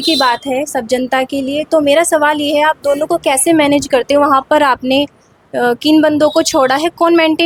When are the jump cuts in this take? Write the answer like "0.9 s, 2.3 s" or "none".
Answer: none